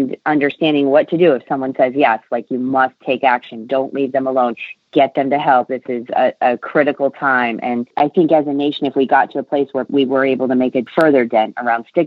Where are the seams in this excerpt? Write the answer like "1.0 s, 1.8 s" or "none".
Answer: 7.9 s, 9.9 s, 10.9 s